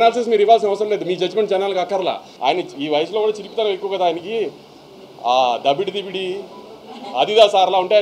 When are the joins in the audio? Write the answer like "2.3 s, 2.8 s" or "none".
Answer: 2.3 s